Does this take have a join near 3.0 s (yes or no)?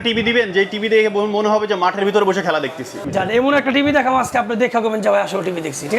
yes